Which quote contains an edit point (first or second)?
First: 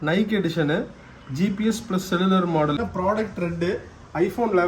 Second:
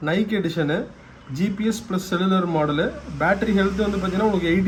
first